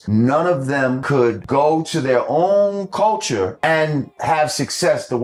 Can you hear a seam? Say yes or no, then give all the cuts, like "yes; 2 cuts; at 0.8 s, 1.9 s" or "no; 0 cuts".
no; 0 cuts